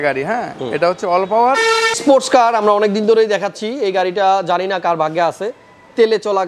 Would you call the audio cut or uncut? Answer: cut